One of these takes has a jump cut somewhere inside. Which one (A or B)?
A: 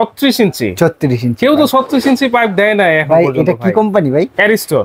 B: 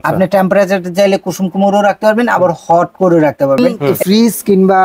B